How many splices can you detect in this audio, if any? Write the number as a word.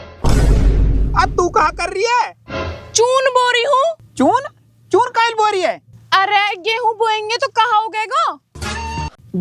one